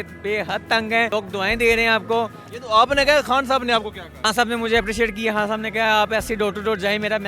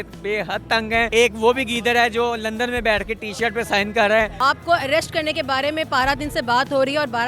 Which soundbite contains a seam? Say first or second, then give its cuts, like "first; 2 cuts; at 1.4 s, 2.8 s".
second; 2 cuts; at 1.1 s, 4.4 s